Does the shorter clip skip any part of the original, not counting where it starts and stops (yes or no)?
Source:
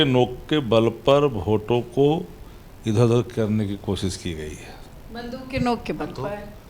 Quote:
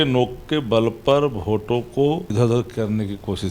yes